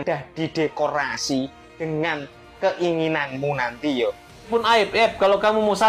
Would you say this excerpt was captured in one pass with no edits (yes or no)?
no